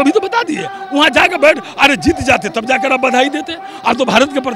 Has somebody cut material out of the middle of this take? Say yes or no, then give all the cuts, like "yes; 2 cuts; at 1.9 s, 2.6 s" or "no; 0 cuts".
no; 0 cuts